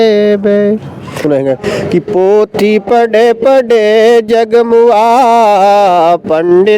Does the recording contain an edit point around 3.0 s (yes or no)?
no